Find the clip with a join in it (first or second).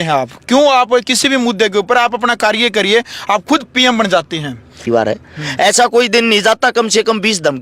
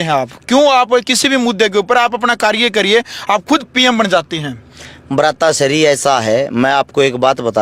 first